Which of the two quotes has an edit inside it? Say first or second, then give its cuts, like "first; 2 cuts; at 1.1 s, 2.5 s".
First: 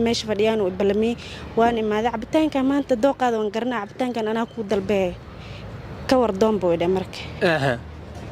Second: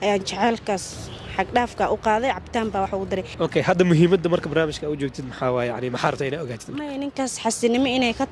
second; 1 cut; at 3.3 s